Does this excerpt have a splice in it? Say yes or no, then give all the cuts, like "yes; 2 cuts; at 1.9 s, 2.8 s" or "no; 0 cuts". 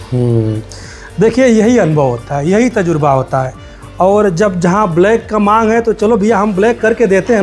no; 0 cuts